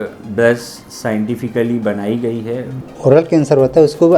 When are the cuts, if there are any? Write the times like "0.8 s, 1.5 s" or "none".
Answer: 2.9 s